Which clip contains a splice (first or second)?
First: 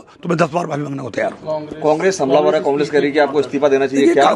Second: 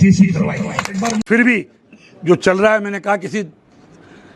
second